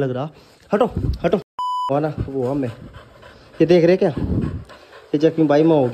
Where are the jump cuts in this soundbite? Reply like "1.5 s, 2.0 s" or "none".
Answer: 1.9 s